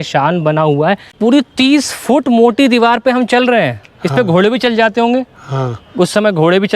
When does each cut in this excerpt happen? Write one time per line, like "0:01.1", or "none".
0:01.1

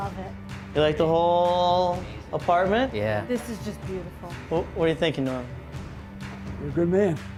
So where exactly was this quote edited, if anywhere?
none

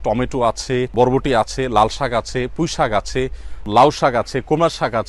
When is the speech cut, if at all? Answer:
0:00.9
0:03.7

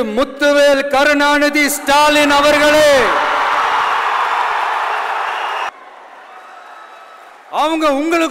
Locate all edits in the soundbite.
0:05.7

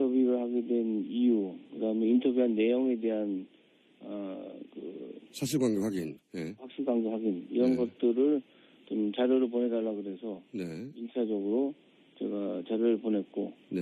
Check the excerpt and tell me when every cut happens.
0:02.5

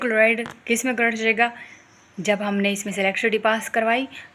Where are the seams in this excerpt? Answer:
none

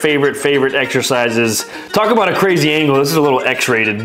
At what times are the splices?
0:01.7

